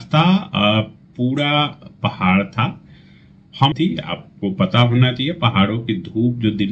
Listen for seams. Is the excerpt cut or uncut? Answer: cut